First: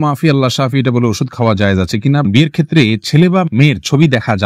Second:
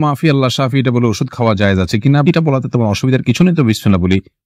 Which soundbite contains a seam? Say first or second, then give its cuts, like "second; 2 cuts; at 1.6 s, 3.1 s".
first; 1 cut; at 2.2 s